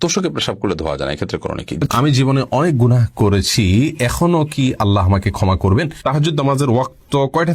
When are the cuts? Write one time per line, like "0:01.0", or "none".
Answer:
0:01.7
0:05.9